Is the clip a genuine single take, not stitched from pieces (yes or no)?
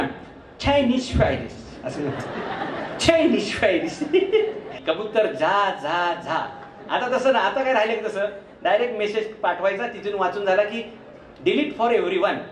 no